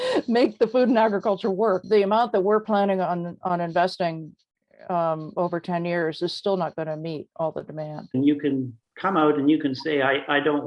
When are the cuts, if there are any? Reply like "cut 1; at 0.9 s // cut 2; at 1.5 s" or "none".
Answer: cut 1; at 1.8 s // cut 2; at 8.1 s